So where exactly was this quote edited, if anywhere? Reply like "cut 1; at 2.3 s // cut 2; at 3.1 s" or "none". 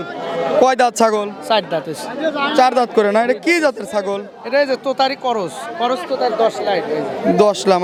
none